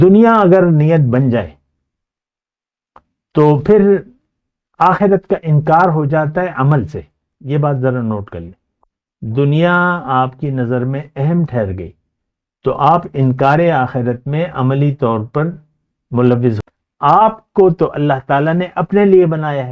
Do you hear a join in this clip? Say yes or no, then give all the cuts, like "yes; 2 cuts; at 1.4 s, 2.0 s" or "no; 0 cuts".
yes; 1 cut; at 16.6 s